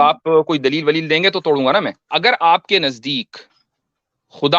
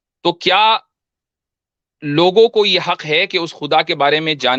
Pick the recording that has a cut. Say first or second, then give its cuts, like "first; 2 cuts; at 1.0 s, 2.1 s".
first; 1 cut; at 2.0 s